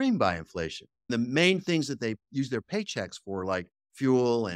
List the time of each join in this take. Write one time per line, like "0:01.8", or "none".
0:01.1